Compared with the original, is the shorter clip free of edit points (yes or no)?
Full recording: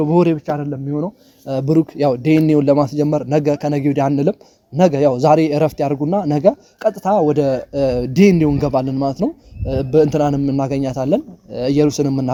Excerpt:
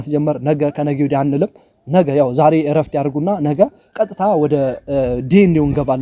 yes